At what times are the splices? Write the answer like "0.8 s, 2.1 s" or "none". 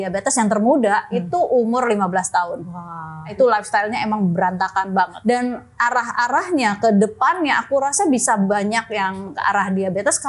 3.3 s, 5.1 s, 9.3 s